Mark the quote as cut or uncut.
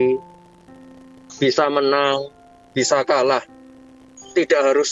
uncut